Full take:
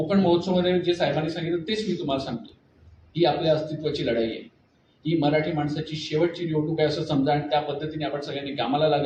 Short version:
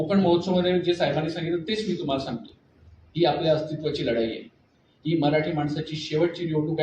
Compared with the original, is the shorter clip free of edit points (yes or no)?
yes